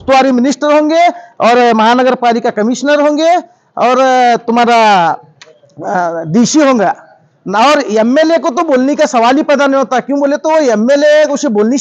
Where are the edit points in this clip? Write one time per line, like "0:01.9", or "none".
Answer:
none